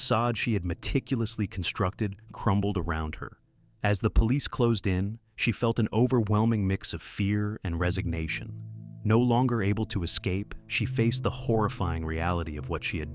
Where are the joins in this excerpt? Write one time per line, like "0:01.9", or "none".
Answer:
none